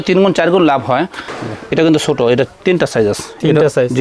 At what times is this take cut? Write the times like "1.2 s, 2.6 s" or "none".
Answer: 1.3 s